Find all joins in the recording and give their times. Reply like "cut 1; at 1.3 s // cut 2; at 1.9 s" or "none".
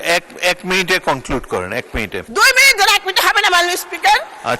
cut 1; at 2.3 s